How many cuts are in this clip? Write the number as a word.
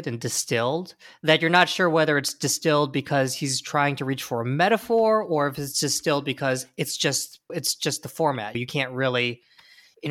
zero